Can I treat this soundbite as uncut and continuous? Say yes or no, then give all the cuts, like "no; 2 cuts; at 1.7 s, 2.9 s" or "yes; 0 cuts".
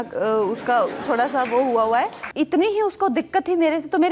no; 1 cut; at 2.2 s